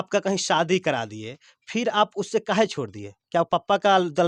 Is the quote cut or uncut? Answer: uncut